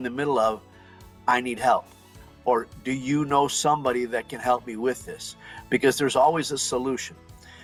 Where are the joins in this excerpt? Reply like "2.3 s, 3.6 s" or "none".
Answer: none